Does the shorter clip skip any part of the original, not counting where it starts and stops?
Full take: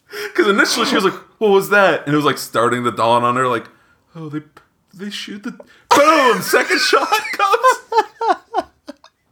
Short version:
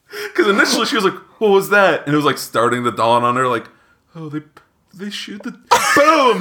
no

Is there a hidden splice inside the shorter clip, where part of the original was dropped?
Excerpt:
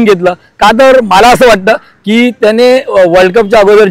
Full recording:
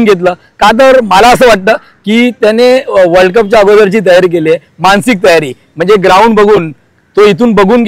no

